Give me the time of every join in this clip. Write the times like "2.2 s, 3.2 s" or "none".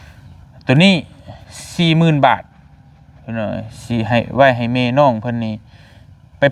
none

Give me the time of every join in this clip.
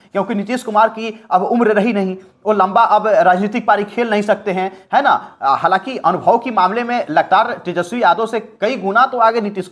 none

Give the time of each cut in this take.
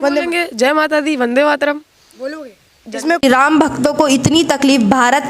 3.2 s

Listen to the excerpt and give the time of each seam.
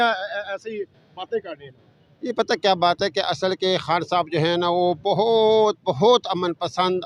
none

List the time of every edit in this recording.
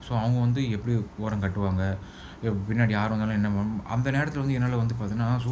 none

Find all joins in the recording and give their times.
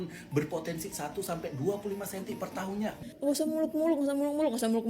3.0 s

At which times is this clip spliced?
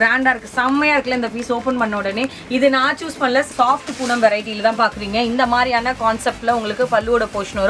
3.5 s

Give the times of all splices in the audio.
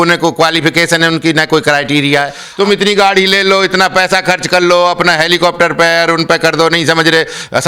2.4 s

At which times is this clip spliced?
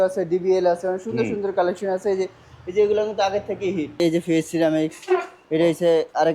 4.0 s

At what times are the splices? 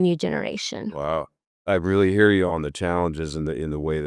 1.6 s, 2.5 s

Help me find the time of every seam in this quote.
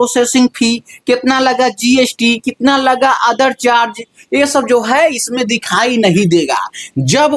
none

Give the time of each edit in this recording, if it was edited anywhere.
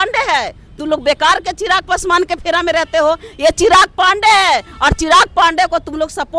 none

